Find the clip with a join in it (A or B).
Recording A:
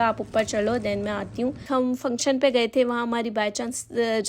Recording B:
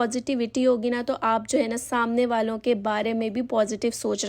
A